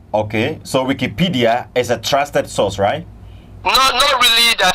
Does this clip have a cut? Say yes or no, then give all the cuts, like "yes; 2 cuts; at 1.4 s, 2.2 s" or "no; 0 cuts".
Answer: no; 0 cuts